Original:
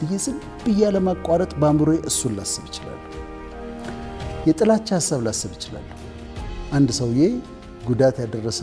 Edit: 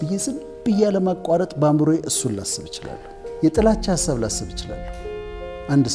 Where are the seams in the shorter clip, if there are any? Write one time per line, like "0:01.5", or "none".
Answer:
0:03.4